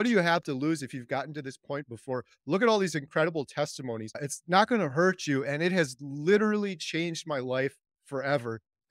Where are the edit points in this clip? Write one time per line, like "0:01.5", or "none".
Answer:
0:04.3